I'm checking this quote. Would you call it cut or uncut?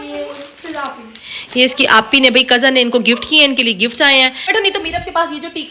cut